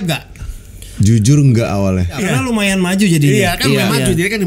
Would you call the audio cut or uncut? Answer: cut